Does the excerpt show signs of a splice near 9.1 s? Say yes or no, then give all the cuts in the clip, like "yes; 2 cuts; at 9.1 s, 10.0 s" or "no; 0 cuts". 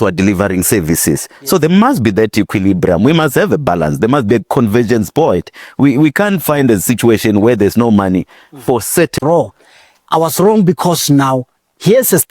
yes; 1 cut; at 9.1 s